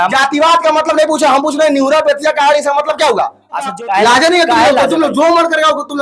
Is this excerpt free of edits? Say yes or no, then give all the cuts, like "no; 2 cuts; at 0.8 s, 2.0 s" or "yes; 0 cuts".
no; 1 cut; at 3.7 s